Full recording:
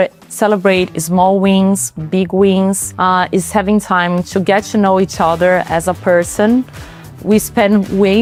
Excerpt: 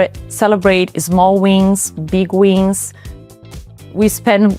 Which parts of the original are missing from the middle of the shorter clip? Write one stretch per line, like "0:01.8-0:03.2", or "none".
0:03.3-0:06.6